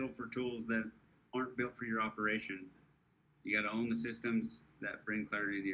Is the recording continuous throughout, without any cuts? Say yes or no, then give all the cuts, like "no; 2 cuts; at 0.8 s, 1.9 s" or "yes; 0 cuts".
no; 1 cut; at 1.1 s